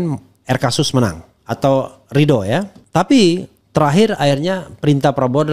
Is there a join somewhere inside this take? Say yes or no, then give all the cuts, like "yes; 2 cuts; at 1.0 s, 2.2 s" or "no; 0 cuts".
yes; 2 cuts; at 2.8 s, 3.5 s